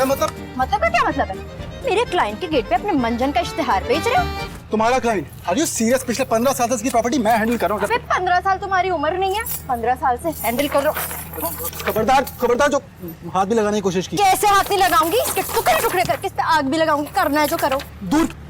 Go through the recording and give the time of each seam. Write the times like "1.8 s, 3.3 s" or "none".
none